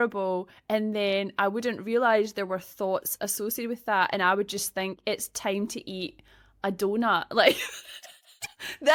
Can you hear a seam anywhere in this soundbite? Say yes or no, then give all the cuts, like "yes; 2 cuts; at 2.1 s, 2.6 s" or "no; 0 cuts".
no; 0 cuts